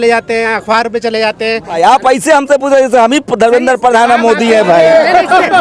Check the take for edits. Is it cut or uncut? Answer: cut